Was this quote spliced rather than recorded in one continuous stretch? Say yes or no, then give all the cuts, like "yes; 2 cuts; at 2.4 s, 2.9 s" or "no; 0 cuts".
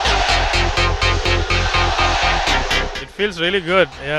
yes; 1 cut; at 3.0 s